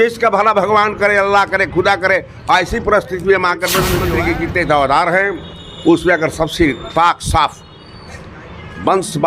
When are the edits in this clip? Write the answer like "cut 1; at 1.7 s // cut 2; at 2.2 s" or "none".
cut 1; at 4.0 s